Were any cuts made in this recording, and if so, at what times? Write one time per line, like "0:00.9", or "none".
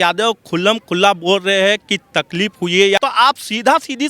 0:03.0